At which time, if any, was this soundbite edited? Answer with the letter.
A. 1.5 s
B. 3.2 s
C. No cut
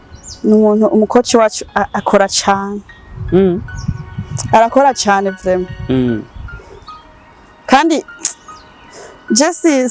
C